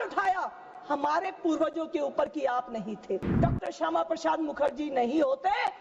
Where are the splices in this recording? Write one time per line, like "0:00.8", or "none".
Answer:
0:03.4